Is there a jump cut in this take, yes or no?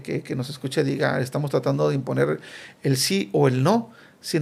no